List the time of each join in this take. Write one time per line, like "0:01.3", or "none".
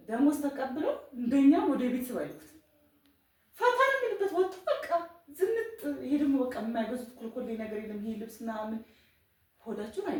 none